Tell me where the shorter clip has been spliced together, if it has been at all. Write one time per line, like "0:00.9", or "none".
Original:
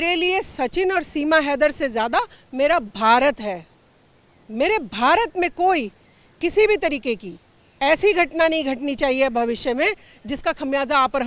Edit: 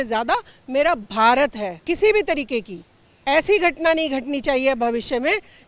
0:01.7